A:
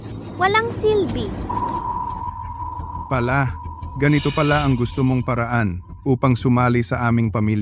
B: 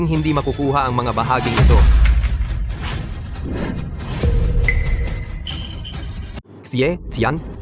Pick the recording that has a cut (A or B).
B